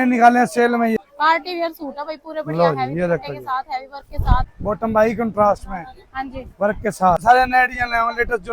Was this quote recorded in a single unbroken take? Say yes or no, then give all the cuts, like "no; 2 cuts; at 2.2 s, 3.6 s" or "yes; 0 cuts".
no; 3 cuts; at 1.0 s, 4.5 s, 7.2 s